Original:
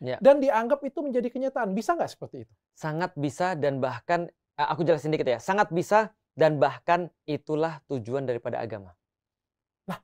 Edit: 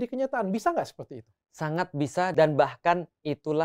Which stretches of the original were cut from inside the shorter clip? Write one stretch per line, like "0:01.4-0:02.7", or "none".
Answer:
0:03.5-0:06.3

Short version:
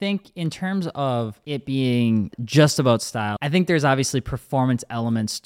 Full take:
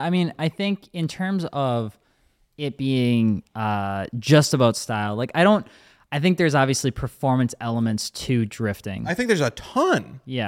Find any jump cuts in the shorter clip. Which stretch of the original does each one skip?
0:02.0-0:02.5
0:03.5-0:04.1
0:05.1-0:06.1

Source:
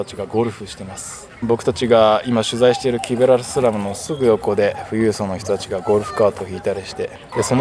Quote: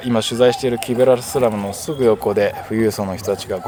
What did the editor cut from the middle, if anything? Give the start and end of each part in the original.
none

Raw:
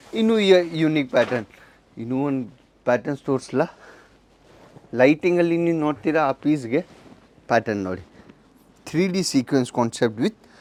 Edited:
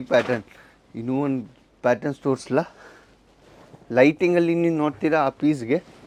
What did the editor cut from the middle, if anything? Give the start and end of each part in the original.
none

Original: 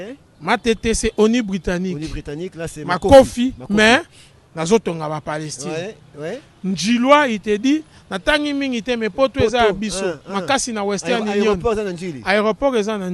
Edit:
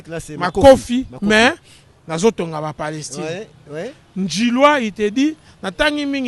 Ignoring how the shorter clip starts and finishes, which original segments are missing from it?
none

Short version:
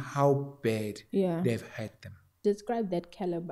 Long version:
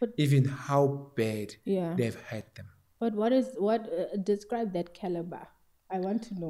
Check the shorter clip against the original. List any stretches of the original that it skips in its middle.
0:02.9-0:04.2

